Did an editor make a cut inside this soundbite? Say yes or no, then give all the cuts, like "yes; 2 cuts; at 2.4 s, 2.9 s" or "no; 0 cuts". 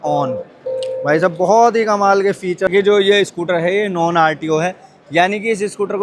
yes; 1 cut; at 2.7 s